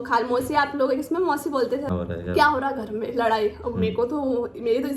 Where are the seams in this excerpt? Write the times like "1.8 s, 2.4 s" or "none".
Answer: 1.9 s